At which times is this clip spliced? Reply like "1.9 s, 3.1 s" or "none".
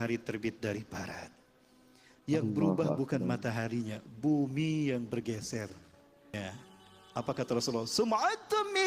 6.4 s